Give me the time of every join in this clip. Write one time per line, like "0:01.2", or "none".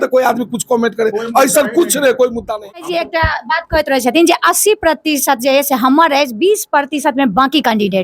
0:02.8